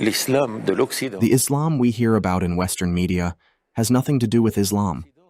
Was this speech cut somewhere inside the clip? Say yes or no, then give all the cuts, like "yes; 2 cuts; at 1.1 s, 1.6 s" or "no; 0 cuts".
yes; 1 cut; at 1.0 s